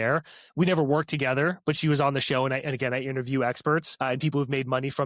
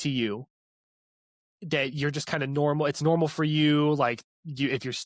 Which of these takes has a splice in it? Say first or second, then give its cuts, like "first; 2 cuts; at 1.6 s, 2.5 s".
first; 1 cut; at 3.9 s